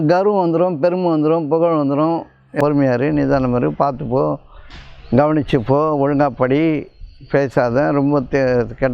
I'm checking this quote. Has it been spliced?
yes; 1 cut; at 2.5 s

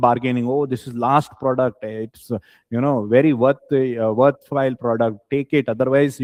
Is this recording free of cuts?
yes; 0 cuts

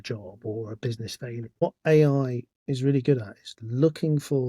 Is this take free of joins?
no; 1 cut; at 1.6 s

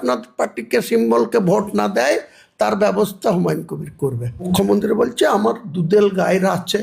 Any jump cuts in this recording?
yes; 1 cut; at 4.5 s

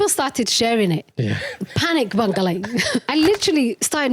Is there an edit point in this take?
yes; 1 cut; at 3.0 s

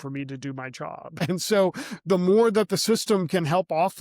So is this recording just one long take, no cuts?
no; 1 cut; at 1.2 s

